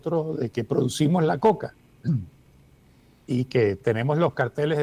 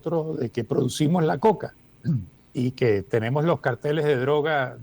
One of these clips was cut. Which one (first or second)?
second